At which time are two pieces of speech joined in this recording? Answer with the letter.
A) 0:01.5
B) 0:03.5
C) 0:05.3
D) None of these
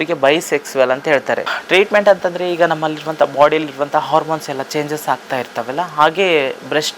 A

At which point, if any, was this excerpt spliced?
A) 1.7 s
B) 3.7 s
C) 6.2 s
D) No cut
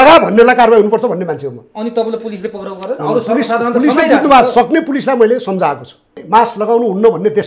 C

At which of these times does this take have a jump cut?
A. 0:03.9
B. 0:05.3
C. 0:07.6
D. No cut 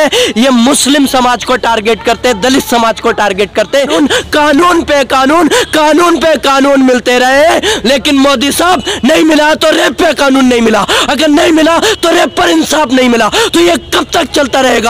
A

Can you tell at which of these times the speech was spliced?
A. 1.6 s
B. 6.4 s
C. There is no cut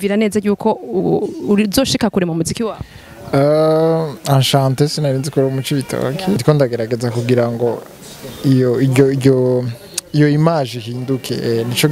B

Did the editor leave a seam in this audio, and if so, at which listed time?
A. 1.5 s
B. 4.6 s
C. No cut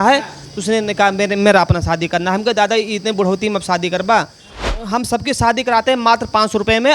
B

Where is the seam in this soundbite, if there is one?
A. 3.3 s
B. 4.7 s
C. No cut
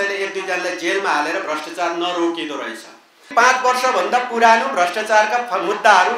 A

